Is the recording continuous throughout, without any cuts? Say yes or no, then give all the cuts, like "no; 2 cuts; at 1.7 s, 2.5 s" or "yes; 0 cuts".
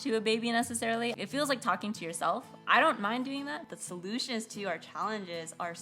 no; 2 cuts; at 1.1 s, 3.6 s